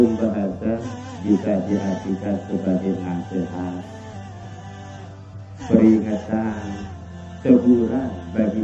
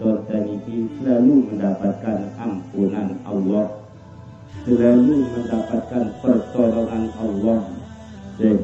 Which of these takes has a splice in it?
first; 2 cuts; at 3.8 s, 5.1 s

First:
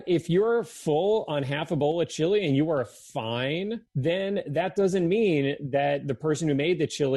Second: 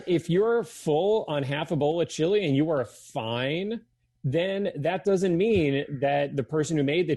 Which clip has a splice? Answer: first; 1 cut; at 3.9 s

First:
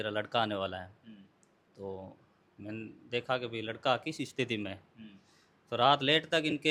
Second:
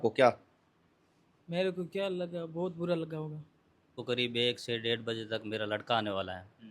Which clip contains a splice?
second; 1 cut; at 4.0 s

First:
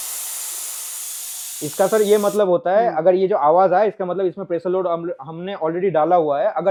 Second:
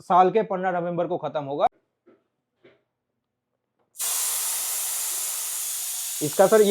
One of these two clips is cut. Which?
second; 1 cut; at 1.9 s

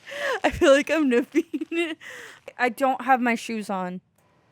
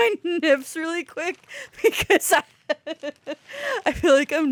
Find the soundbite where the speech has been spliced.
first; 1 cut; at 2.5 s

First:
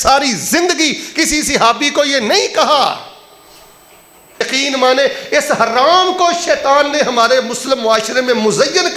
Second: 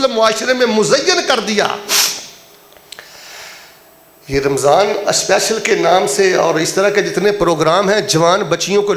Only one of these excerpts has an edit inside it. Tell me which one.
first; 1 cut; at 4.4 s

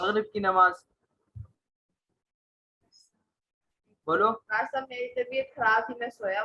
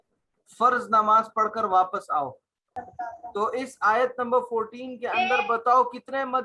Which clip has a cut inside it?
second; 1 cut; at 2.8 s

